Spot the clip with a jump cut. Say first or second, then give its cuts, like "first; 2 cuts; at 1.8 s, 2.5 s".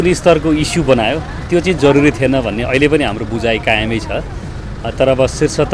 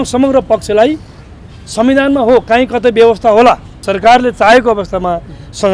second; 1 cut; at 3.8 s